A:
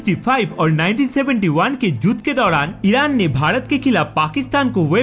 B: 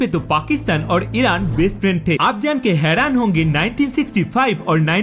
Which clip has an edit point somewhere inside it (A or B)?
B